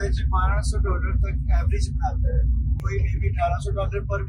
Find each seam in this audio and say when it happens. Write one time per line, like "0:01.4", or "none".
0:02.8